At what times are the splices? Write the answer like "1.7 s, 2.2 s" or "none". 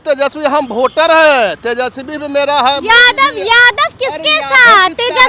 none